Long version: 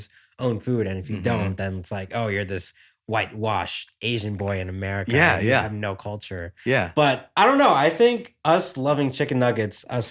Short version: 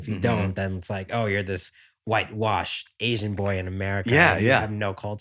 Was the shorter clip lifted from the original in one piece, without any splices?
yes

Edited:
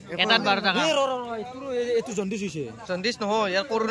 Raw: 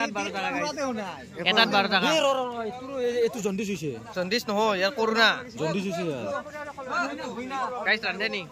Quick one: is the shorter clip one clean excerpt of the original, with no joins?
yes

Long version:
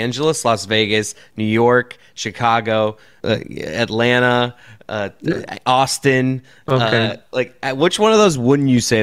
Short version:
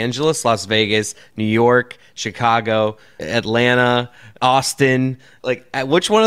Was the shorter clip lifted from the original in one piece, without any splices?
no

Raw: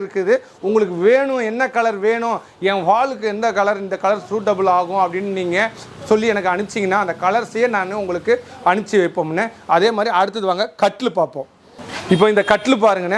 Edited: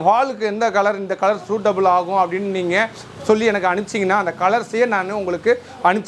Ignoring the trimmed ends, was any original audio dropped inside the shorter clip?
no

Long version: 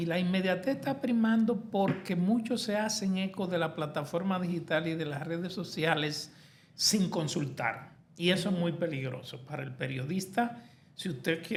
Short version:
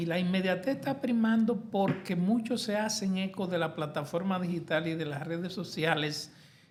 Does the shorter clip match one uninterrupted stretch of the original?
yes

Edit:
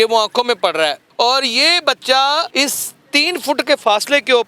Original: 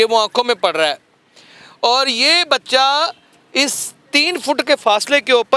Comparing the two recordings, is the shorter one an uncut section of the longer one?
no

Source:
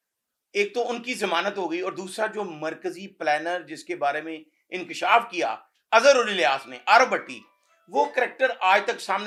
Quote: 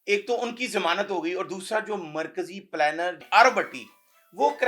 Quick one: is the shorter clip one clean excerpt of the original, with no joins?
no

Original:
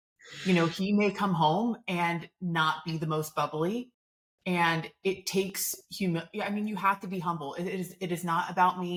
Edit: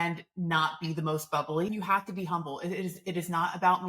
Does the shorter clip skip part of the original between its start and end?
yes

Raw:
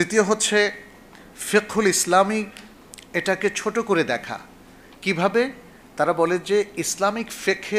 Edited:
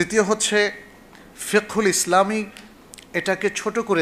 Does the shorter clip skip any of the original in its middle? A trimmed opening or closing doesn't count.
no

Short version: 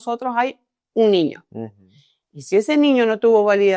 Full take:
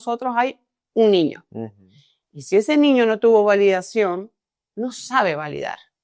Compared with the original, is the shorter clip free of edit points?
yes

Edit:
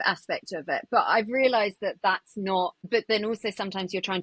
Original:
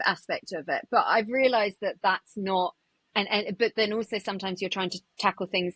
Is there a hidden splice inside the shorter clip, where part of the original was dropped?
yes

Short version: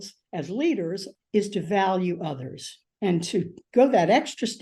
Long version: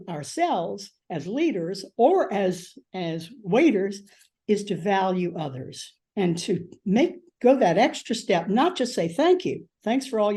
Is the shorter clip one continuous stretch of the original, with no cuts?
no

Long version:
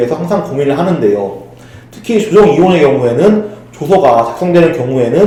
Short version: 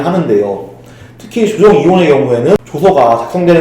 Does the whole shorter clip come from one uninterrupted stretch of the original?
no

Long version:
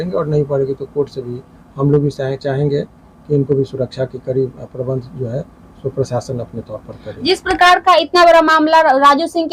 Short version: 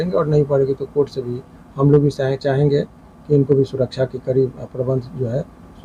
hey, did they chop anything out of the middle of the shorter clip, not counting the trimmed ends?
no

